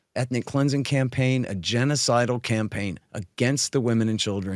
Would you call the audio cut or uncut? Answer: uncut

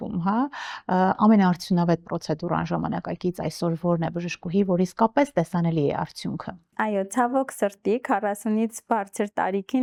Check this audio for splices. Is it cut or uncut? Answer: uncut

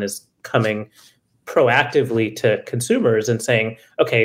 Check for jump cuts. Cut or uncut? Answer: uncut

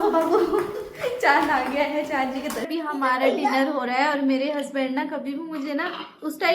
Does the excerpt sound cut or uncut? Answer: cut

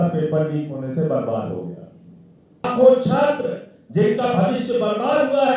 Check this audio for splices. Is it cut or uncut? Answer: cut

